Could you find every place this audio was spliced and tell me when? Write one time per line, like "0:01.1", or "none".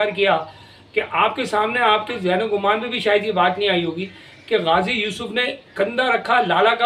none

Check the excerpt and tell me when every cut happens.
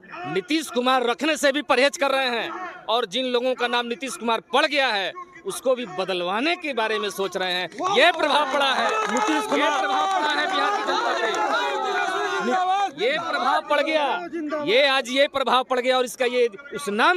none

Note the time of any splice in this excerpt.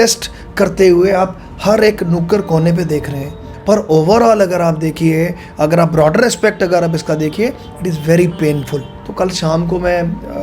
0:03.5
0:09.0

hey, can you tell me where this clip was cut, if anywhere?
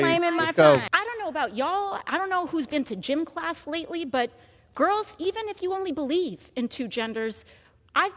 0:00.9

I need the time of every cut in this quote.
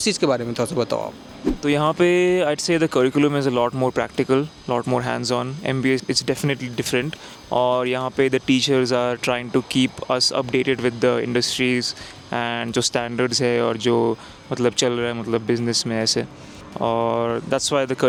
none

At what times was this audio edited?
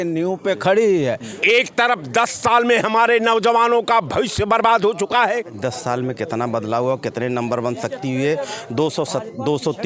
0:01.3
0:05.6

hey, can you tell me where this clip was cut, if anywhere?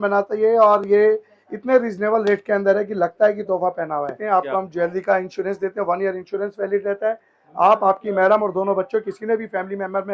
0:04.3

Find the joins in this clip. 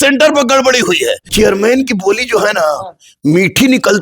0:01.2

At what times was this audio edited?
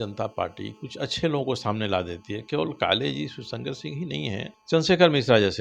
0:04.5

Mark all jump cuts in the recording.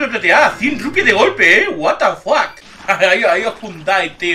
0:02.7

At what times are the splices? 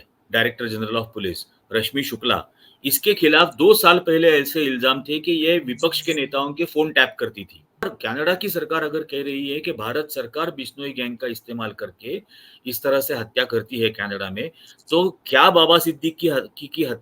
0:07.8

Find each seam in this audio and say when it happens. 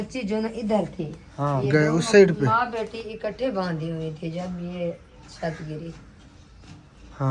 none

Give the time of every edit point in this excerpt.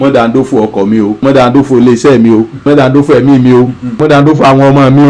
0:01.2
0:02.6
0:04.0

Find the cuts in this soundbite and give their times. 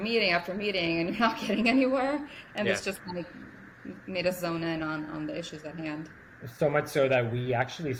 none

